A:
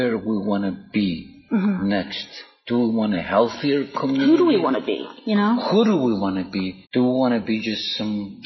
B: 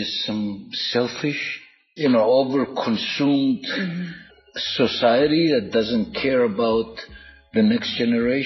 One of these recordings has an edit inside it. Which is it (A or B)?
B